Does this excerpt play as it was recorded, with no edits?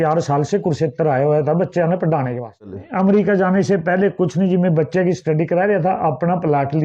no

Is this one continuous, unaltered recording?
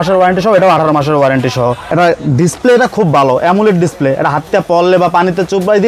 no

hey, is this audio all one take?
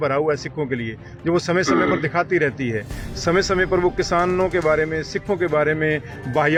yes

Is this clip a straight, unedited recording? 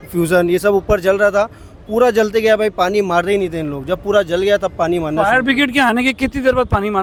yes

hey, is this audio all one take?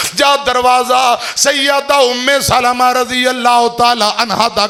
yes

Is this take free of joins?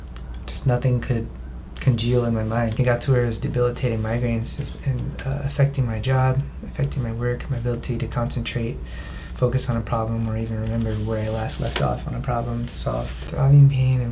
no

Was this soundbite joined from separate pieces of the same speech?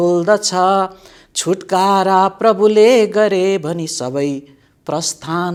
no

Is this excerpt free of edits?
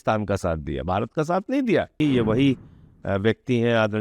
no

